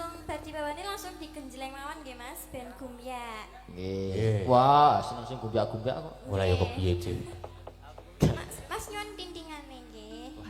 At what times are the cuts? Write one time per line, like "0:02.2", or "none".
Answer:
none